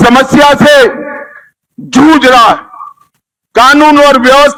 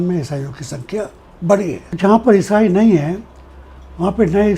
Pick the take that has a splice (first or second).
second